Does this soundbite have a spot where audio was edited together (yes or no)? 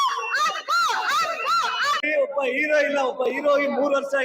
yes